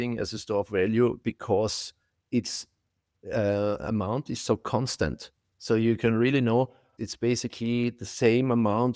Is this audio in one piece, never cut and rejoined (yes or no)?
no